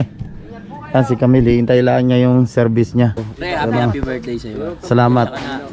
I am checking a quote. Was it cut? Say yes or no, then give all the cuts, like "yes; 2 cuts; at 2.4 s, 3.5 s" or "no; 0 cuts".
yes; 1 cut; at 3.3 s